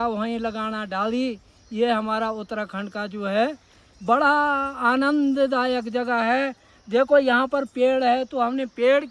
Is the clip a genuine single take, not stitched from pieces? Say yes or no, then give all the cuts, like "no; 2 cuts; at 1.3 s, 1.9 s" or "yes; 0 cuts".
yes; 0 cuts